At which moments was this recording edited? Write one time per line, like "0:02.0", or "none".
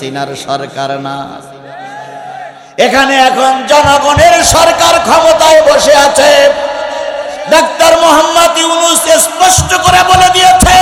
none